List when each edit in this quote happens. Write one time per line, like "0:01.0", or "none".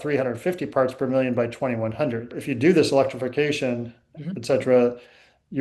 0:02.3